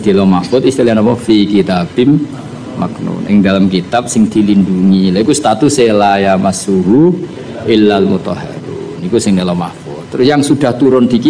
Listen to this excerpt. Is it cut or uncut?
uncut